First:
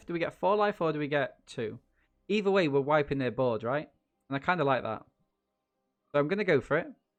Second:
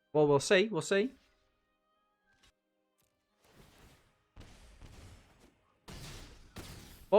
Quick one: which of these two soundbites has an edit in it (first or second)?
second